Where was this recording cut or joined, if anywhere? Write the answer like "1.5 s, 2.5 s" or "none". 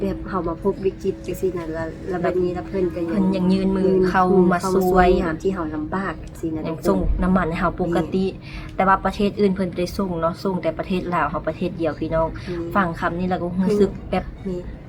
none

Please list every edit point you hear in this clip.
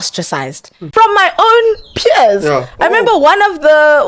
0.9 s

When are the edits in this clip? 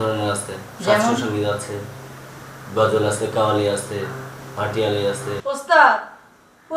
5.4 s

